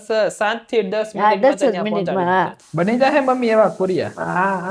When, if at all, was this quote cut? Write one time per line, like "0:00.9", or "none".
0:02.6